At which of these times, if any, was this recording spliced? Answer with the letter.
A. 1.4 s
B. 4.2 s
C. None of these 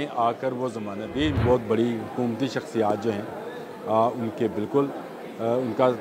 A